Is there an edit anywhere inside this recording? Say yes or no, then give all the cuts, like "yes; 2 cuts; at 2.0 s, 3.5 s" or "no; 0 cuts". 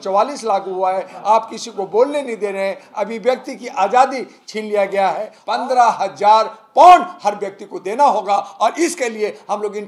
yes; 1 cut; at 5.3 s